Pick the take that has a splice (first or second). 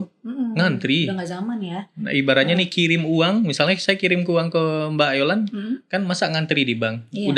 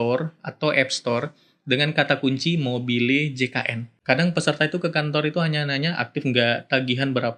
second